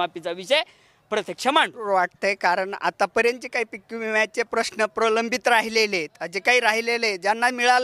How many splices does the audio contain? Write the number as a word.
one